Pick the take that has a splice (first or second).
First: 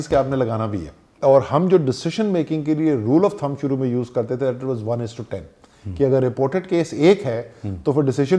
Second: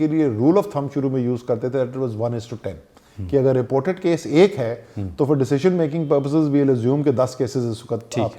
first